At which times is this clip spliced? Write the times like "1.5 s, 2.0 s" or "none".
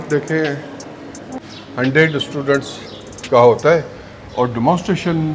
1.4 s